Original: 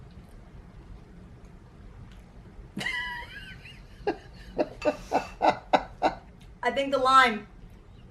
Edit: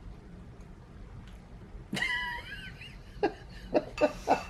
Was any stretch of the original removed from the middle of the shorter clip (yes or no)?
no